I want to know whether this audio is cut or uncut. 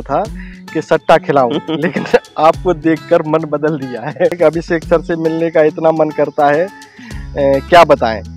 cut